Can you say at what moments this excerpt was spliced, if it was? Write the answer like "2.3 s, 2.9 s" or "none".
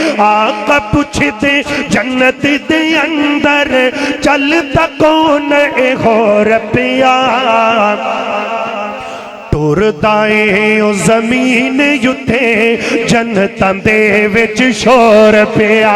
none